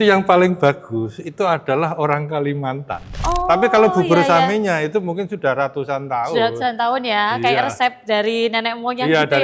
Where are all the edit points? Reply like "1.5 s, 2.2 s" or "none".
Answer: 3.2 s

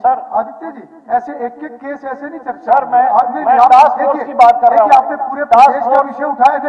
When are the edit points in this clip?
none

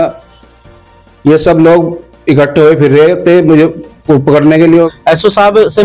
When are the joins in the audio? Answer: 4.9 s

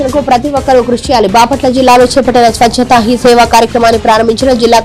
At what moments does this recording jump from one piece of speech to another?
none

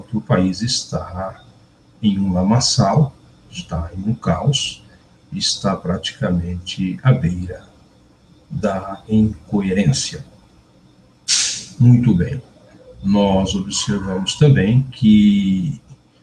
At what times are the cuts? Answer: 12.5 s

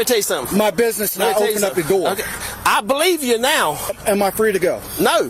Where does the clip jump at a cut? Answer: 4.0 s

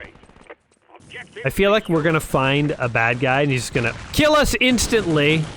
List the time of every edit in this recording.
1.4 s

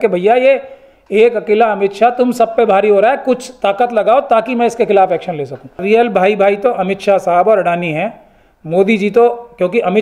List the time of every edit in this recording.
5.8 s

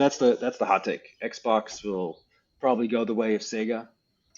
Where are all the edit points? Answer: none

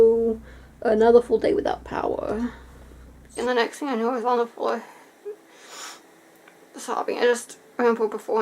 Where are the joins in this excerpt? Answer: 3.4 s

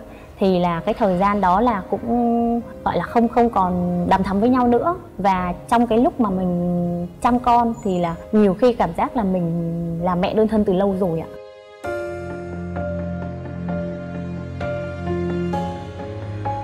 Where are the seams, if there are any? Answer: none

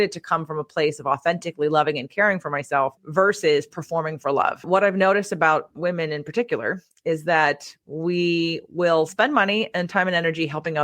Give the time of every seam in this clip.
3.0 s, 4.6 s

